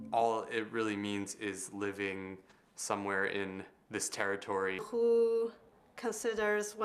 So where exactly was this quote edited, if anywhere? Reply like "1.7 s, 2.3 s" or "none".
none